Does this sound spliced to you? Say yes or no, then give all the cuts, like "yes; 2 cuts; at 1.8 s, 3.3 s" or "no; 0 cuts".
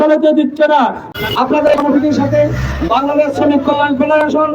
yes; 1 cut; at 1.1 s